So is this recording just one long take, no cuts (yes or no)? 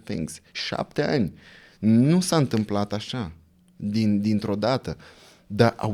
yes